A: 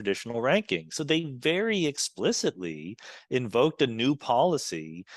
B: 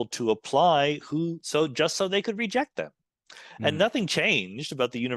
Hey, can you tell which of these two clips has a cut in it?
A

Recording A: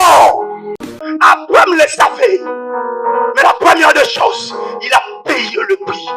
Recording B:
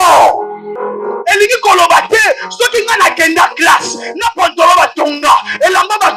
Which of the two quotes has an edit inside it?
A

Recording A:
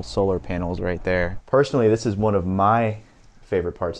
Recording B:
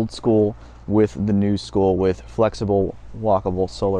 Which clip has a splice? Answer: A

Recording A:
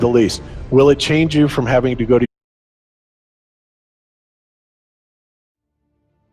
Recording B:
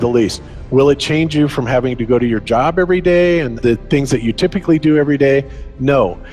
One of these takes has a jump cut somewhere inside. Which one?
B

